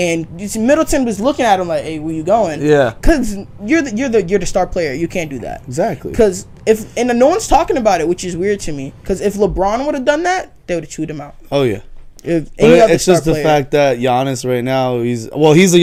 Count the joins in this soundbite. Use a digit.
0